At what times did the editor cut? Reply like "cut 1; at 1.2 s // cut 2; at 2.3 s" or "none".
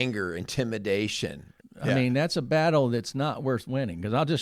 cut 1; at 1.5 s